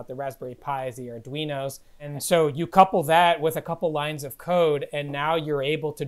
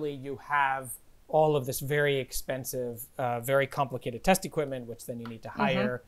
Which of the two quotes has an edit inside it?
first; 1 cut; at 2.1 s

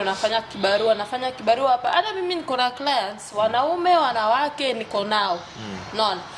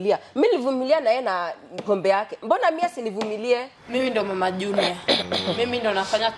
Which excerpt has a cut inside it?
second; 1 cut; at 3.8 s

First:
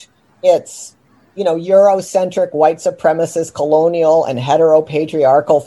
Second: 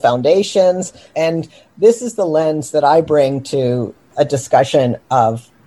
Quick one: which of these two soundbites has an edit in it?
second; 2 cuts; at 1.1 s, 3.9 s

